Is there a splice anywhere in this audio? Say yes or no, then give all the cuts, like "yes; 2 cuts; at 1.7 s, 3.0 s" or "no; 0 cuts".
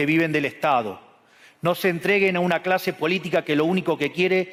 no; 0 cuts